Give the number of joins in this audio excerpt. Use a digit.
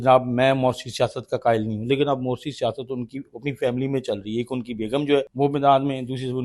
1